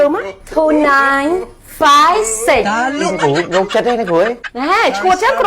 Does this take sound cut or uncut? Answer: cut